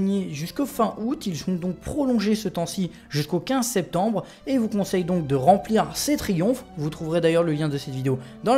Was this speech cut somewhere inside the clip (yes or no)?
yes